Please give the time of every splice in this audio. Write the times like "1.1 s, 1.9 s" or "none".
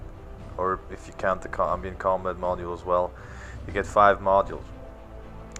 none